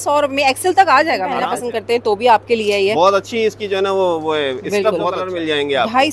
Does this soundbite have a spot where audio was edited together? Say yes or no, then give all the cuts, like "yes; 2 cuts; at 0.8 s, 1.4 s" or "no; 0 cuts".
yes; 2 cuts; at 1.4 s, 5.2 s